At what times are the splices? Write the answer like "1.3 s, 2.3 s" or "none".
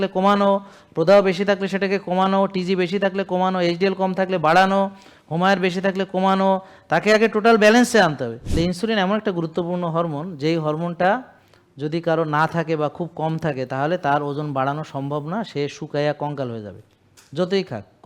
8.4 s